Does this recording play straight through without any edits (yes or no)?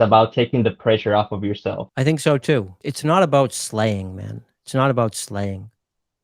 no